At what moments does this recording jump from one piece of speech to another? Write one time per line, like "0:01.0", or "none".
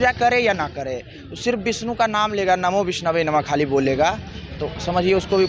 none